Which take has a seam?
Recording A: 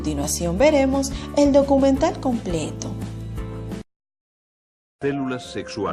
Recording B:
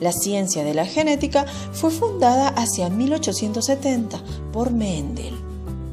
A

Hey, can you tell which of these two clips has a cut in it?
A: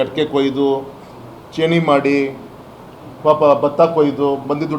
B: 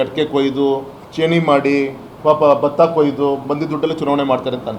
B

